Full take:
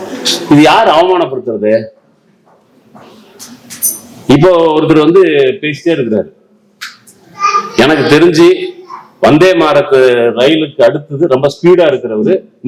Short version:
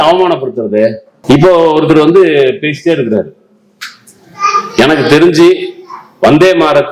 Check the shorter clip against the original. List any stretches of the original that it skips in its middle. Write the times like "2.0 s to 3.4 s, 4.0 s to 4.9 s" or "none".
2.0 s to 4.1 s